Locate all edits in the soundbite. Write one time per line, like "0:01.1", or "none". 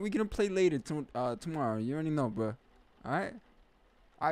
none